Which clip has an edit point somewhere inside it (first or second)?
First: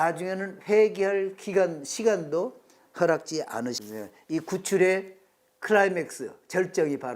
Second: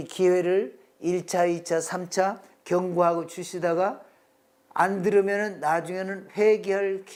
first